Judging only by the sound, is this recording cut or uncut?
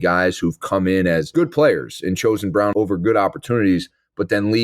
cut